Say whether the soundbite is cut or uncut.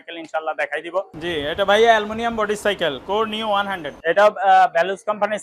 cut